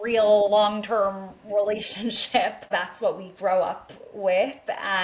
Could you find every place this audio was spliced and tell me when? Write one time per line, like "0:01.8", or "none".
0:02.7

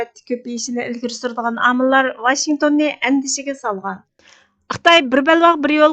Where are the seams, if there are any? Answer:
0:04.5

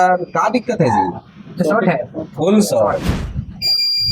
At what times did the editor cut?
0:03.2

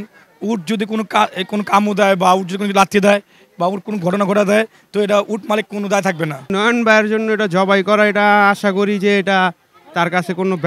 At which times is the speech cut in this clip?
0:06.5

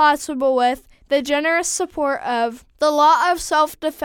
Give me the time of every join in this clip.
0:02.6

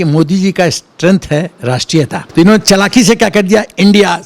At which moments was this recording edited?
0:02.2

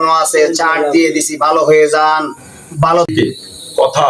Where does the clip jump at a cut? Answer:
0:03.1

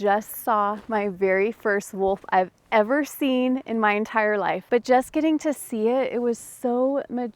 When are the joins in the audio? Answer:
0:04.6

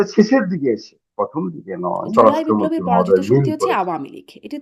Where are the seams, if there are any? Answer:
0:02.0

